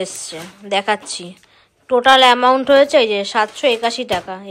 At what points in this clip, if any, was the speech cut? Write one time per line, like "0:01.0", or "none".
none

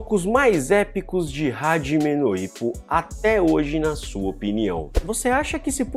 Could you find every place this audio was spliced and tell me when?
0:04.9

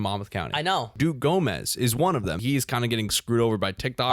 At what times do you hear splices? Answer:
0:00.9
0:02.4

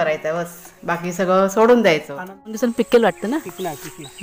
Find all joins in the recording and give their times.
0:02.6

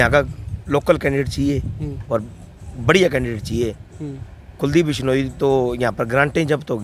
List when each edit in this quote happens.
none

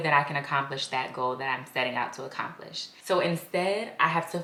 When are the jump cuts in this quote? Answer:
none

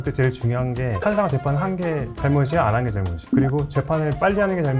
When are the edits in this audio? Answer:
0:00.9

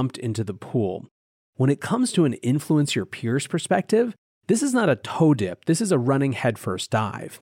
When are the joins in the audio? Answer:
0:01.3

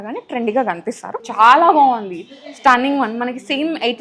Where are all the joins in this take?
0:01.1

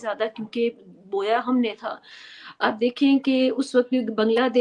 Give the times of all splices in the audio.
none

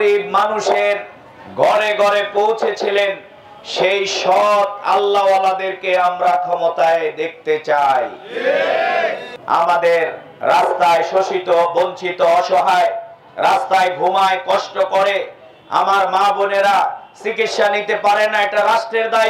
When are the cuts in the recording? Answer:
0:09.3

